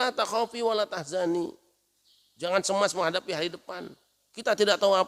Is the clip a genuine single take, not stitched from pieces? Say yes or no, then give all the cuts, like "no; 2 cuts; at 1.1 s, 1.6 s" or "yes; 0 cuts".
yes; 0 cuts